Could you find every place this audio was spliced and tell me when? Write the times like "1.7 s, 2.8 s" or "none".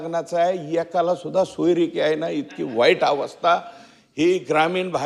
none